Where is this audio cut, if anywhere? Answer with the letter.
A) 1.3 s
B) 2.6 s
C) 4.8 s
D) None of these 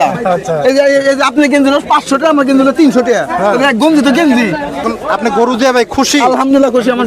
C